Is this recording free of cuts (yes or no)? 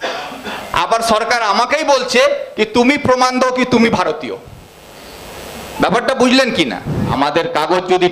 no